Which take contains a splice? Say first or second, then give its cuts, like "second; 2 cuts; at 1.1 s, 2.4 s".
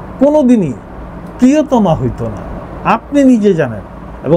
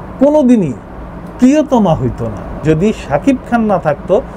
second; 1 cut; at 2.6 s